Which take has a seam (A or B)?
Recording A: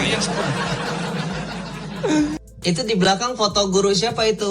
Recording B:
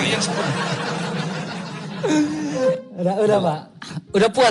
A